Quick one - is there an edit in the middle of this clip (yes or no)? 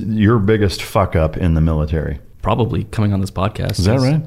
yes